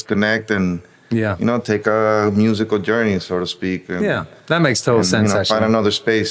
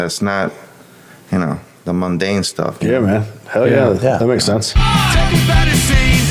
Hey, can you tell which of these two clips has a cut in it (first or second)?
second